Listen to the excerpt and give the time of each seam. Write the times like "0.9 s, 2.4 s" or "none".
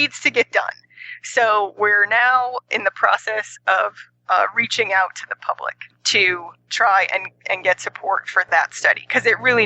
6.2 s, 8.5 s